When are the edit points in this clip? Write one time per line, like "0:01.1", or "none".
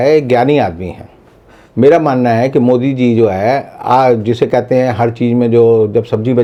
none